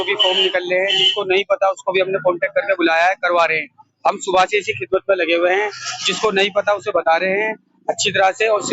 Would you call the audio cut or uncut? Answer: uncut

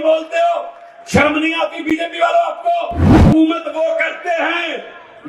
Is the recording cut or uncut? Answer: cut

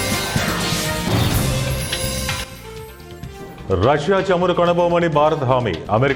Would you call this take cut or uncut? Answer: uncut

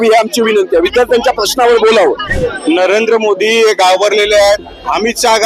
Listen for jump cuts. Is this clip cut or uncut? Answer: cut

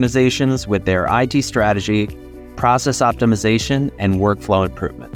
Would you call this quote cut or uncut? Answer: uncut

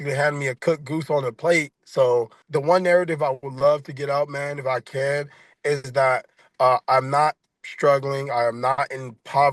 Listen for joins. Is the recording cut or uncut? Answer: cut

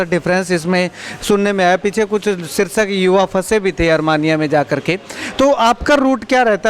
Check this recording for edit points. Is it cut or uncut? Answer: uncut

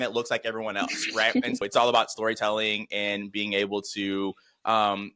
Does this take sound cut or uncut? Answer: cut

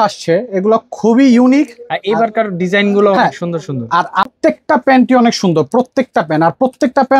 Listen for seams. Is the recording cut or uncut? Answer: cut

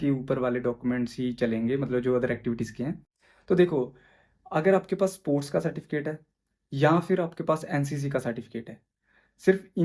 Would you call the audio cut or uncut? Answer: uncut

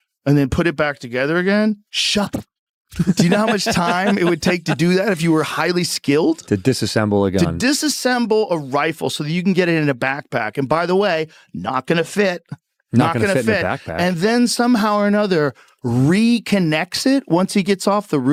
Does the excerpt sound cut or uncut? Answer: uncut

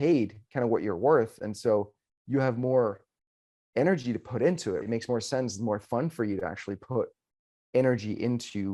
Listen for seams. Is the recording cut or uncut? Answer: cut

